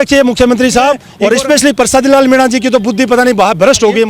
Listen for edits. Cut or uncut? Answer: cut